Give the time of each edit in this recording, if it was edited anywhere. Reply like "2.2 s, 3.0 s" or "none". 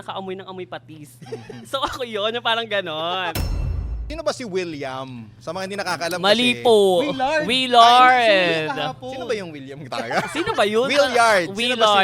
3.7 s